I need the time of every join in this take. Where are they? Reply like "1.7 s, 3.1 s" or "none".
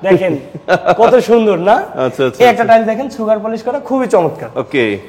none